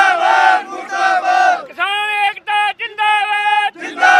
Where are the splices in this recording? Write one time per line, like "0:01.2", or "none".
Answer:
none